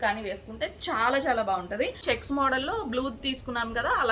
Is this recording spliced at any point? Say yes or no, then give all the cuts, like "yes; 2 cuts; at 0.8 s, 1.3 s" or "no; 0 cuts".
yes; 1 cut; at 2.0 s